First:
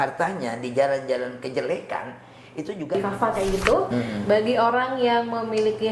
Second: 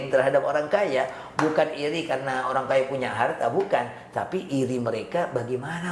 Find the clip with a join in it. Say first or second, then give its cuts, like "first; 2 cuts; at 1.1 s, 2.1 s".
first; 1 cut; at 3.0 s